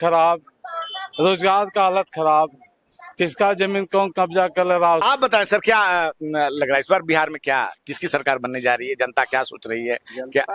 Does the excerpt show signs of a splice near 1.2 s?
no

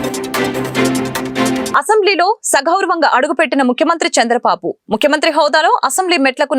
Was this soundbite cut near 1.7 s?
yes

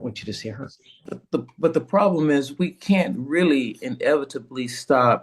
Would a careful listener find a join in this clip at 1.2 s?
yes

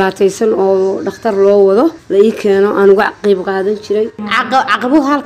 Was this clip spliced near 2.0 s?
yes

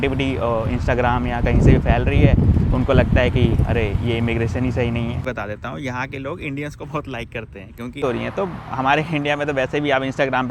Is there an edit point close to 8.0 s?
yes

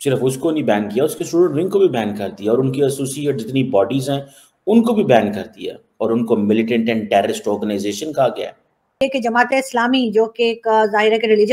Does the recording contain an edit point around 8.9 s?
yes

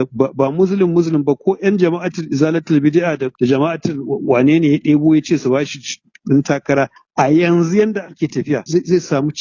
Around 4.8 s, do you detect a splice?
no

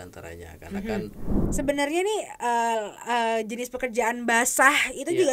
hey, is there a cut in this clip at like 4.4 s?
no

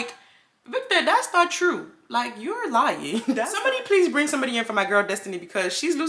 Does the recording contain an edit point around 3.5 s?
yes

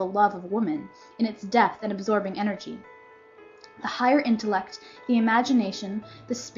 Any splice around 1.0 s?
yes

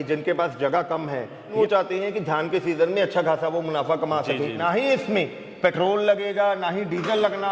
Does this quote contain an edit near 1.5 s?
yes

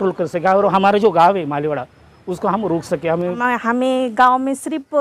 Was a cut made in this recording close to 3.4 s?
yes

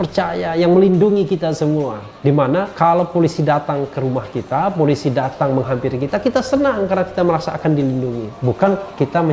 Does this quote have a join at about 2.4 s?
yes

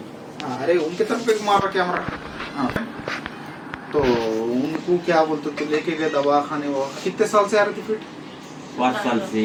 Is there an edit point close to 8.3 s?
no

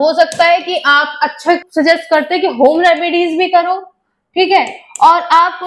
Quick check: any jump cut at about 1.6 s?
yes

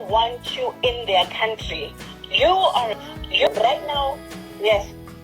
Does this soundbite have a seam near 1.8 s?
no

